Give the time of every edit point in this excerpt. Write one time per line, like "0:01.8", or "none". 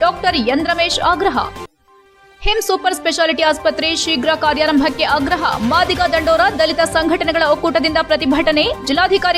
none